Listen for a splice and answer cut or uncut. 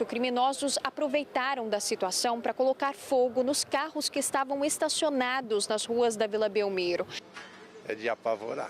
cut